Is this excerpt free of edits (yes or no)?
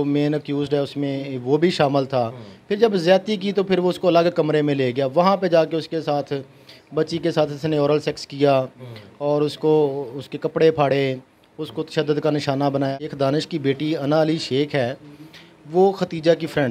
no